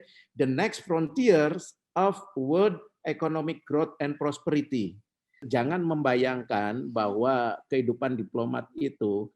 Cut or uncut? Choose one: cut